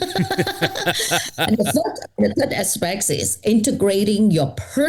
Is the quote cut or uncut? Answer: uncut